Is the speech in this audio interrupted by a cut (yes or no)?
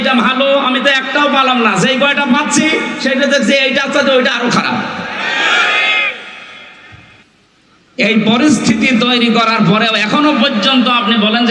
yes